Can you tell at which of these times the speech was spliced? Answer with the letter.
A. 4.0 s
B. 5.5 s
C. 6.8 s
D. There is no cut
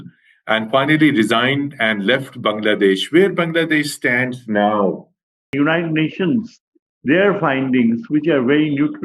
B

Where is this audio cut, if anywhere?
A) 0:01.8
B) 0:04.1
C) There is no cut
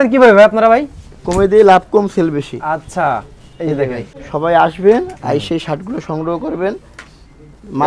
B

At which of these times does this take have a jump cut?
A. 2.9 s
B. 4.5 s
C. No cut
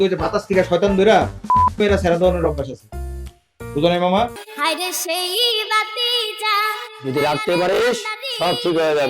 B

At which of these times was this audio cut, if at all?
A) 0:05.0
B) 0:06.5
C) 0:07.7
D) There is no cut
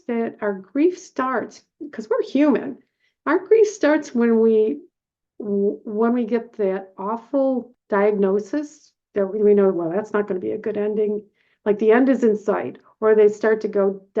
C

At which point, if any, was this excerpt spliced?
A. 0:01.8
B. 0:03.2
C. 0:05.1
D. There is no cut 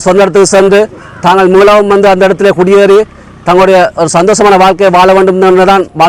D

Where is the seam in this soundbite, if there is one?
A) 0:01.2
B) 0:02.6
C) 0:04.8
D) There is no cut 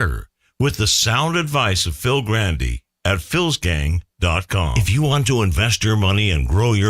C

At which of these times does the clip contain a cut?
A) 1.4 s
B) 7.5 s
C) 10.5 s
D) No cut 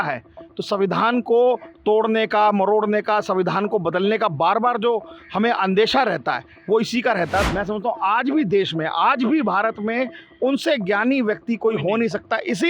B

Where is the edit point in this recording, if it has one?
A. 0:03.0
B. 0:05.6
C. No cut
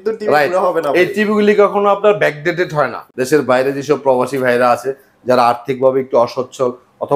A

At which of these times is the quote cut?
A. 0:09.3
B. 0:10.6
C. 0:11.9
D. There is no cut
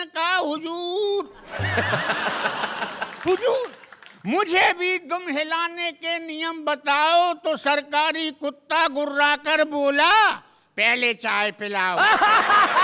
D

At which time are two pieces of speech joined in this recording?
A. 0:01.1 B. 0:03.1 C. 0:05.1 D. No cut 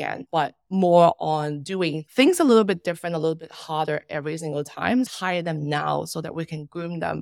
C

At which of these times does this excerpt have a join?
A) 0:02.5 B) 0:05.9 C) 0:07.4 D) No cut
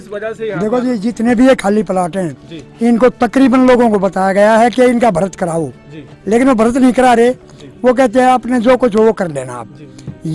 D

